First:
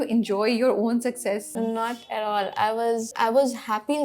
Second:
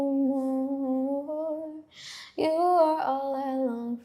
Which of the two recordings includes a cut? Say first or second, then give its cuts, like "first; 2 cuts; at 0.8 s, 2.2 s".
first; 2 cuts; at 1.5 s, 3.1 s